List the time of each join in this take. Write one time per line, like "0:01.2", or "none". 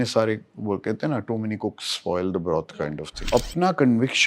0:03.3